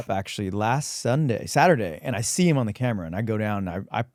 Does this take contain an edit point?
no; 0 cuts

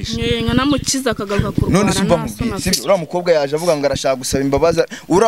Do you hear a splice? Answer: no; 0 cuts

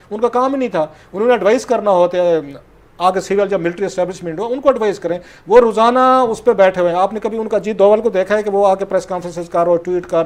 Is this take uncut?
yes; 0 cuts

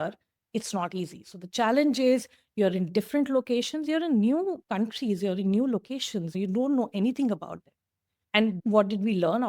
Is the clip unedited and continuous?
no; 1 cut; at 8.4 s

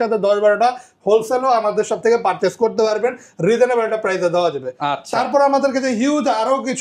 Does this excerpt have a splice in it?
no; 0 cuts

